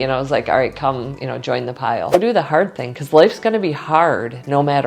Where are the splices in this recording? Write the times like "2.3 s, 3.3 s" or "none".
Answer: 2.1 s